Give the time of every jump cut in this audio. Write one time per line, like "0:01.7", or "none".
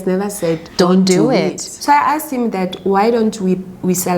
0:01.7